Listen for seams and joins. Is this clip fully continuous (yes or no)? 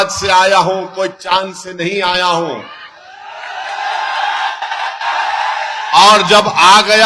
yes